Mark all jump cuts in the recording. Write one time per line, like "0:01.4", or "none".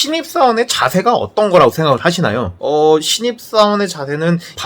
0:02.5